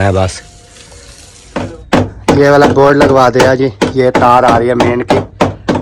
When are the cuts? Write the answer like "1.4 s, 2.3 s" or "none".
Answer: 1.4 s